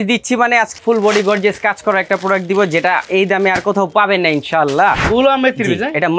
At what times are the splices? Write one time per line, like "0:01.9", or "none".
0:00.8
0:03.0
0:05.0